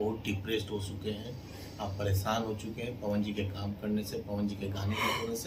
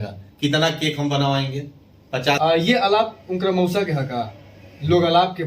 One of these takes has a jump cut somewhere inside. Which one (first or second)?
second